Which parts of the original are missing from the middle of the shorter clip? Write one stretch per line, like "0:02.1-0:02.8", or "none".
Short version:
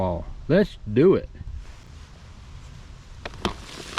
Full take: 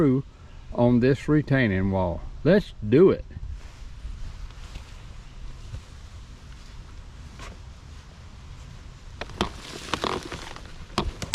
0:03.8-0:07.8